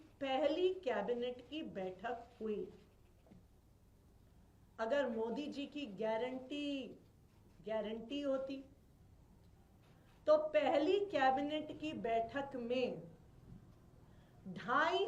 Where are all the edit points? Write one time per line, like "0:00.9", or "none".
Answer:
none